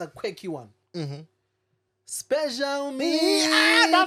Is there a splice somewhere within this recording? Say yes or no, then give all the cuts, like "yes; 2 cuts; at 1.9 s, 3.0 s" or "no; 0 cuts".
no; 0 cuts